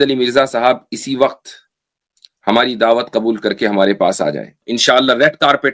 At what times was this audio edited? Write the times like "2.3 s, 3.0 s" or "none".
4.6 s